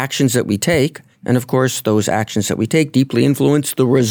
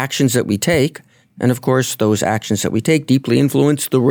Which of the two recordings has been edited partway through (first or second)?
first